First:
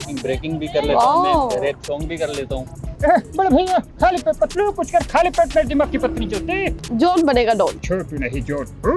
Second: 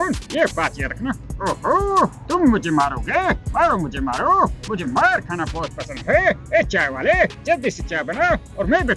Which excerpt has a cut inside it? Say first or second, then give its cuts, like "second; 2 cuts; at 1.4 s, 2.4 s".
first; 3 cuts; at 2.9 s, 6.8 s, 7.8 s